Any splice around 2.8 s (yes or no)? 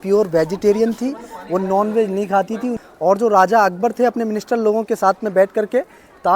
yes